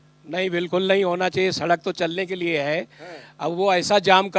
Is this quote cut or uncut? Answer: uncut